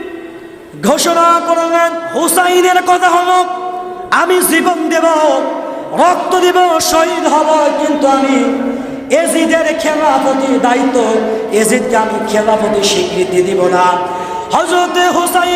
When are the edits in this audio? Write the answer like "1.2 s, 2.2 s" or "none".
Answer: 2.1 s